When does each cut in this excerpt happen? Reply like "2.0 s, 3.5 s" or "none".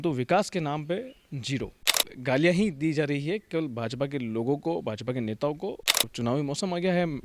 2.1 s, 5.9 s